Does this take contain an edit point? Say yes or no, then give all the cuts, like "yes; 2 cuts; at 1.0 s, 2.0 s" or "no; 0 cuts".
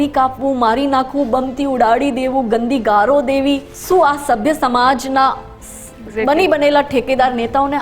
yes; 1 cut; at 3.7 s